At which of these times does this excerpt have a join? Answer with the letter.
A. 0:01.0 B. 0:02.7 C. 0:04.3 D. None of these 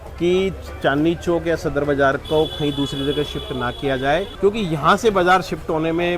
C